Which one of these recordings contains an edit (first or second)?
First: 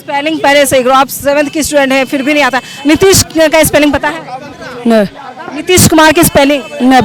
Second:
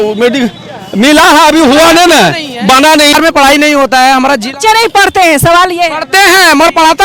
second